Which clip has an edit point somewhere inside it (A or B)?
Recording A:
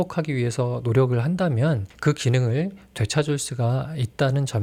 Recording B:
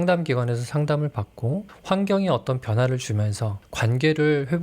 B